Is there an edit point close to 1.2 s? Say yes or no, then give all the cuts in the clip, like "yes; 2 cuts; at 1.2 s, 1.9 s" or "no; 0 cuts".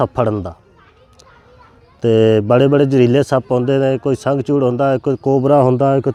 no; 0 cuts